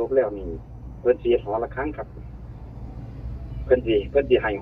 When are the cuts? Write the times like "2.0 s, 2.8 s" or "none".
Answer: none